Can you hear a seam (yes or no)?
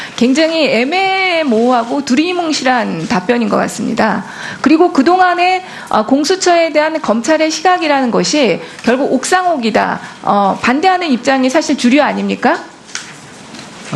no